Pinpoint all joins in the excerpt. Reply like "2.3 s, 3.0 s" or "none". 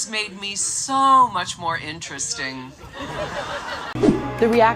3.8 s